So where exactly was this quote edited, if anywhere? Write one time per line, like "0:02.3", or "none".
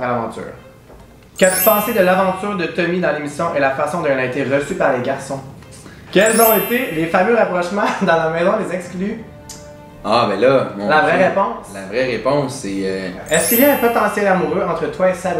0:01.3
0:05.9
0:13.2